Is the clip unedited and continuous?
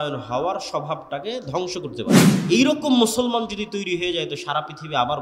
no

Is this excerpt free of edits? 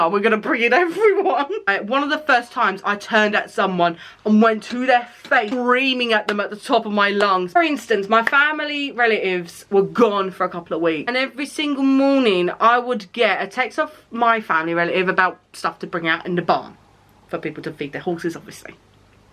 yes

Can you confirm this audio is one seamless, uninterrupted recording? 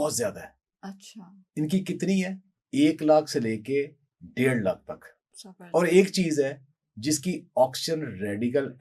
yes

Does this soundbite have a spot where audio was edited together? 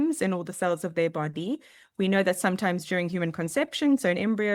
no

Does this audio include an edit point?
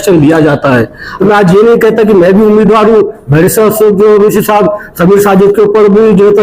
yes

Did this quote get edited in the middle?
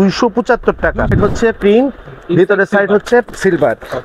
yes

